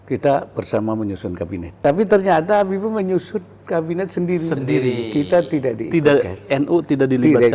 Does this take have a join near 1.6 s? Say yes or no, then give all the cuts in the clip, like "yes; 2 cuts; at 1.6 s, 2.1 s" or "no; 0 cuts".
yes; 1 cut; at 1.6 s